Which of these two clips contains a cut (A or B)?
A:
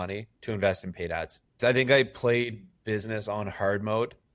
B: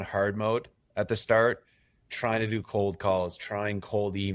A